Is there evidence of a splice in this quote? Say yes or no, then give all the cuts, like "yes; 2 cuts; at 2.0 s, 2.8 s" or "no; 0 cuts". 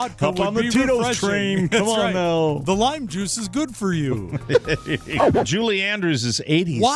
yes; 1 cut; at 5.4 s